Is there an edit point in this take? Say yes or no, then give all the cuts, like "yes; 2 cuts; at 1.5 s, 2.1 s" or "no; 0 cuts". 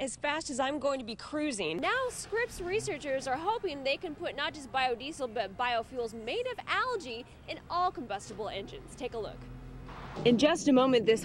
yes; 2 cuts; at 1.8 s, 10.1 s